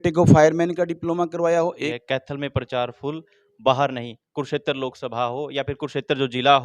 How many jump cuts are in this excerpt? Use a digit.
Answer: 1